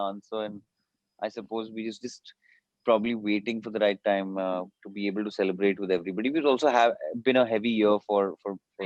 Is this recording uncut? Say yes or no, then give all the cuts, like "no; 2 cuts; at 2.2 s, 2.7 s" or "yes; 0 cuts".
yes; 0 cuts